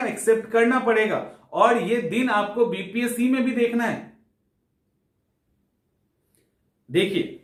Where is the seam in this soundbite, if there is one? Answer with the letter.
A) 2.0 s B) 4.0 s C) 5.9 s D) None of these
D